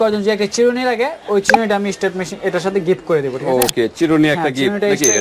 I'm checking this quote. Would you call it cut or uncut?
uncut